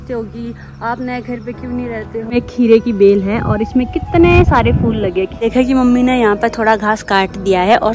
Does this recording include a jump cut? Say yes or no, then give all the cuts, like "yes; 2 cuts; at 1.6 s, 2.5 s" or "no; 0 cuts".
yes; 2 cuts; at 2.3 s, 5.5 s